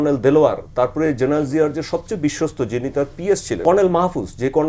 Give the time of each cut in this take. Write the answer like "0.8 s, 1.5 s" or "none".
3.6 s